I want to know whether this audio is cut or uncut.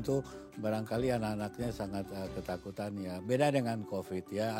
uncut